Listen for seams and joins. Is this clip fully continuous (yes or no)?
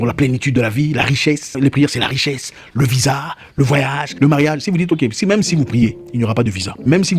yes